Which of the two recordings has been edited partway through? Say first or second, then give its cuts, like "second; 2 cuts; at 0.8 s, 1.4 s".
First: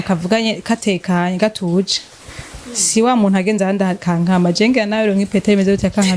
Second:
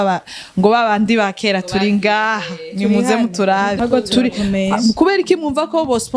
second; 1 cut; at 3.8 s